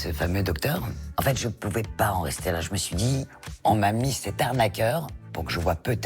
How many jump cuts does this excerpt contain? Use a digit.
1